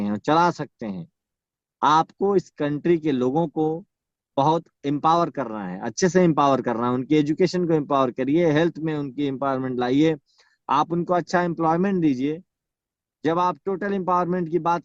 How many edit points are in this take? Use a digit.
0